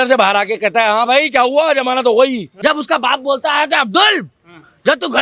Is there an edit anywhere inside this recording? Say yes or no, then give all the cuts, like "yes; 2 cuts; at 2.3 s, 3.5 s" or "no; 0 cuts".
yes; 1 cut; at 2.5 s